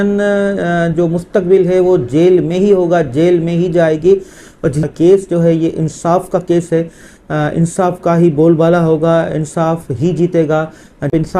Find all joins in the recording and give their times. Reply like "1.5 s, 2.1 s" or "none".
4.9 s